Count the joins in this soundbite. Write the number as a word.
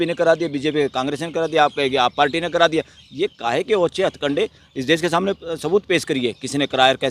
zero